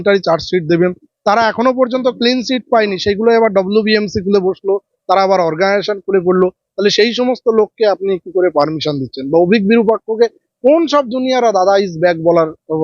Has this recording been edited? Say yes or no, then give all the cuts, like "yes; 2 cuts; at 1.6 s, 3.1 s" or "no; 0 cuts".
no; 0 cuts